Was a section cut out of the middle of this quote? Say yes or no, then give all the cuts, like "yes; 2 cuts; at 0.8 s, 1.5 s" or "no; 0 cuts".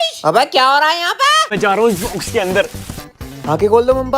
yes; 1 cut; at 1.5 s